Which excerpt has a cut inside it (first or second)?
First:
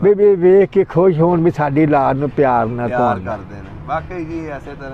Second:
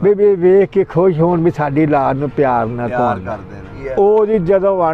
second